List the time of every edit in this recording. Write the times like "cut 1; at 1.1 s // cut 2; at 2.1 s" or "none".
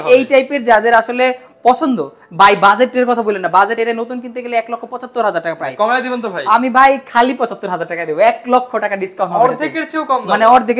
none